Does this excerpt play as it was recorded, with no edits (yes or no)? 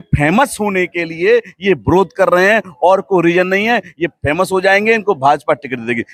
yes